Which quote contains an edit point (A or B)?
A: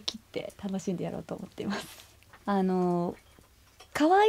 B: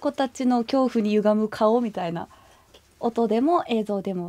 A